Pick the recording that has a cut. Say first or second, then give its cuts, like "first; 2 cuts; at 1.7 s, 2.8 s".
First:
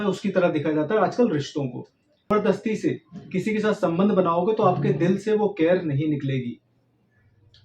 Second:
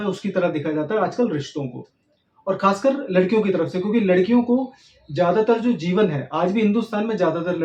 first; 1 cut; at 2.3 s